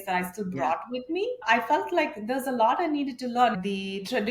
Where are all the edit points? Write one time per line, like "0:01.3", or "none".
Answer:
0:01.5
0:03.6